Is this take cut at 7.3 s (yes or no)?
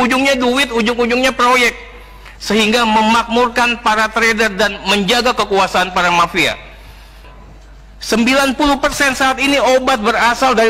yes